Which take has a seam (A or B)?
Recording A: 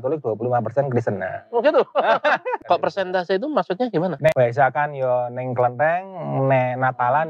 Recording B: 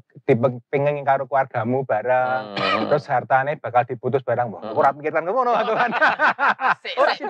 A